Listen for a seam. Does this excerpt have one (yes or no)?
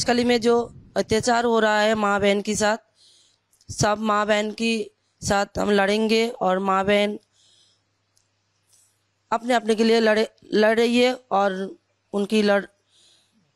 no